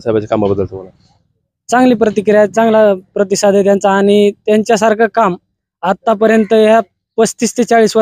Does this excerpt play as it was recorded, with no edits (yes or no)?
yes